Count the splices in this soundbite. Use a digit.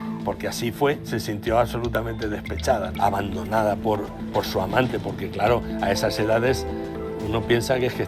0